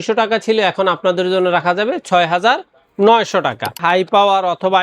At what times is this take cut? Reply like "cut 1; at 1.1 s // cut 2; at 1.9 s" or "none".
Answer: cut 1; at 3.8 s